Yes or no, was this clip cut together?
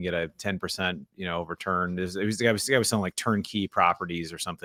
no